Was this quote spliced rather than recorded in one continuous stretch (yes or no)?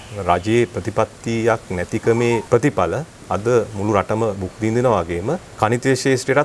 yes